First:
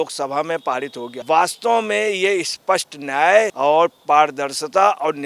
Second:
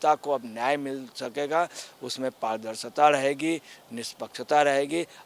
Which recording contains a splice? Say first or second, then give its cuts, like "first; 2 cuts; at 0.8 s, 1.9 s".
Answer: first; 2 cuts; at 1.1 s, 3.5 s